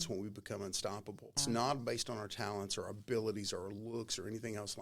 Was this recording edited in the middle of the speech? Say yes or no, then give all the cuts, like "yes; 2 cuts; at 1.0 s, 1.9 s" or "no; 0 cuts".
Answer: yes; 1 cut; at 1.4 s